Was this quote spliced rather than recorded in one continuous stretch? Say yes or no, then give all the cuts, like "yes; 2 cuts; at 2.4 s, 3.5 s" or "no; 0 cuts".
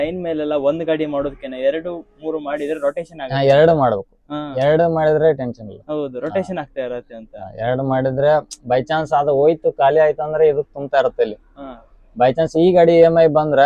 no; 0 cuts